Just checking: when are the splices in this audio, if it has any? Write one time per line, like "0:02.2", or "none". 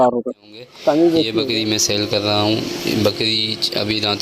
0:01.3